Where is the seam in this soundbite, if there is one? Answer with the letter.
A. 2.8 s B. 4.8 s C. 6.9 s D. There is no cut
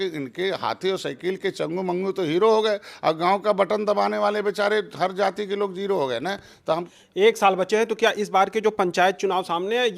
C